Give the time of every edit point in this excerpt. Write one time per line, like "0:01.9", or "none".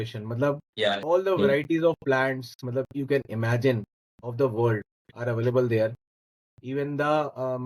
0:01.0